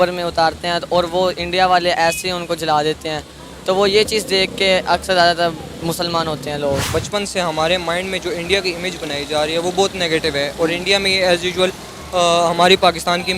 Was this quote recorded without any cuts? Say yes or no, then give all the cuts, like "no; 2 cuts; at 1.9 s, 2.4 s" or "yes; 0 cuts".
no; 1 cut; at 6.9 s